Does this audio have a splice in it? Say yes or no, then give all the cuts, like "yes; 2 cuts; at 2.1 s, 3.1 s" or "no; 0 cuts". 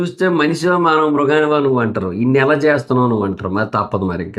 no; 0 cuts